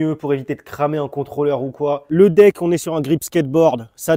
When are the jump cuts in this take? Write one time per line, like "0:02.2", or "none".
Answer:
0:02.1